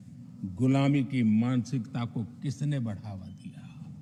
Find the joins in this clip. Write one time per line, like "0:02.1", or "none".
none